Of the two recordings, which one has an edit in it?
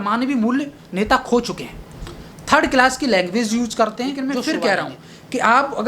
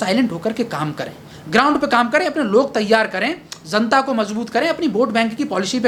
first; 1 cut; at 4.2 s

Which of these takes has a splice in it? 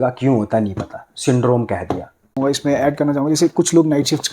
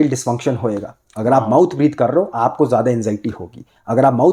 first; 1 cut; at 2.4 s

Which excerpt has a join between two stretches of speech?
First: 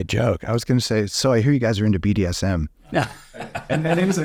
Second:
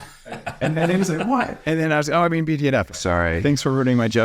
second; 1 cut; at 2.9 s

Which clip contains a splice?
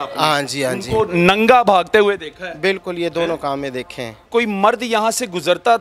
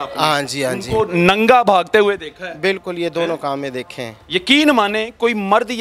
first; 1 cut; at 4.2 s

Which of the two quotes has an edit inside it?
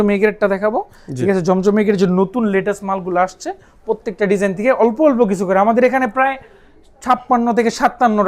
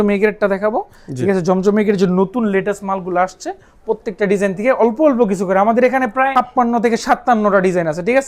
second; 1 cut; at 6.3 s

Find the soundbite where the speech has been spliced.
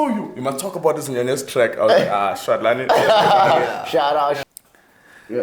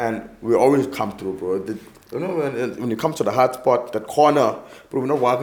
first; 1 cut; at 4.4 s

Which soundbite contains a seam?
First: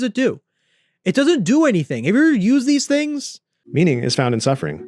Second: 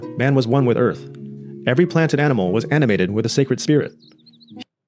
first; 1 cut; at 3.6 s

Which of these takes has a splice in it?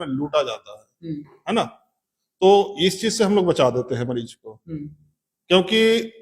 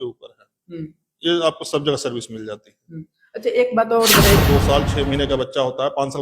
second; 1 cut; at 4.4 s

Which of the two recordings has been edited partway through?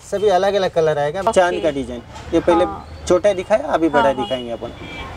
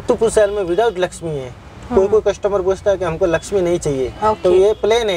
first; 1 cut; at 1.3 s

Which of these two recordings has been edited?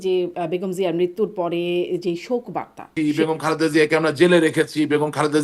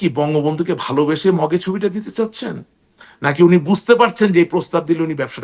first; 1 cut; at 2.9 s

